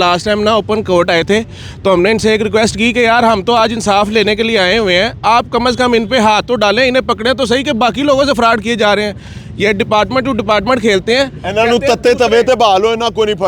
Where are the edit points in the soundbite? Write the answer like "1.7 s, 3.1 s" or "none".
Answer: none